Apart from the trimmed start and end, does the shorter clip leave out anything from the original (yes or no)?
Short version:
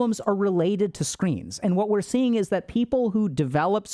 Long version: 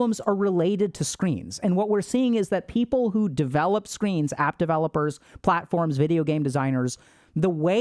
no